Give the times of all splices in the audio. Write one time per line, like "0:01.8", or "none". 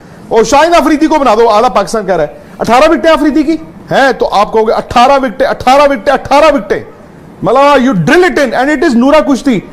0:03.7

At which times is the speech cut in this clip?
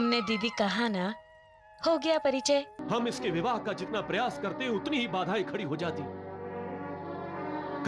0:02.8

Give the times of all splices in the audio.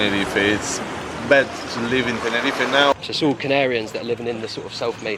0:02.9

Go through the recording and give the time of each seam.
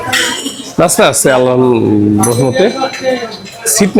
none

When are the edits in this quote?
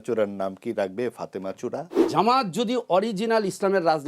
0:02.0

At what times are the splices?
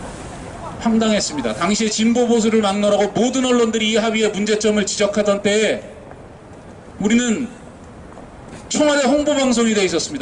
none

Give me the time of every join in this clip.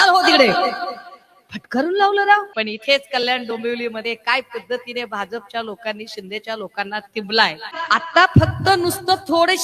0:02.5
0:07.8

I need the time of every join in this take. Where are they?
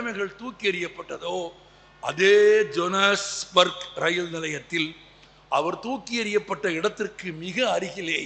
none

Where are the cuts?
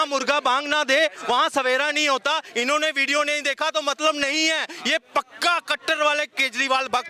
none

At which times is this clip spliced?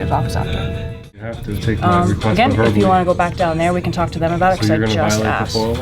0:01.3

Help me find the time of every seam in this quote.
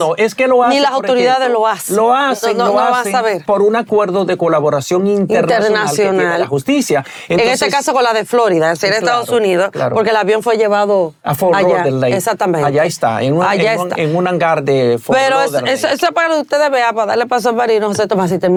none

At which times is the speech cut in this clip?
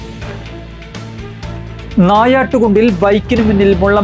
0:01.1

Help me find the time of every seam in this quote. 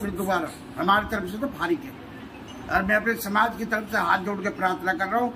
none

